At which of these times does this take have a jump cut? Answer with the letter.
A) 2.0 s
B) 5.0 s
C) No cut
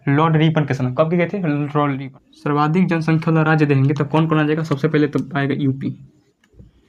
A